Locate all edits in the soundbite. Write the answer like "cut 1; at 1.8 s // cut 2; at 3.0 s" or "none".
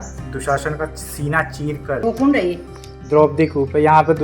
cut 1; at 2.0 s